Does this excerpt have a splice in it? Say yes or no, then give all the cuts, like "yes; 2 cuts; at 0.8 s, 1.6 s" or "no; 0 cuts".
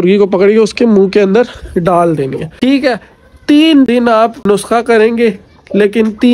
yes; 2 cuts; at 2.4 s, 4.0 s